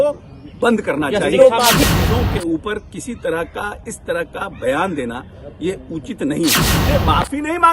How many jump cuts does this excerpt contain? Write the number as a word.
two